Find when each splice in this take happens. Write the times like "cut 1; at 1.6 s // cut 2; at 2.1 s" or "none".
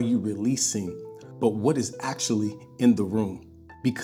none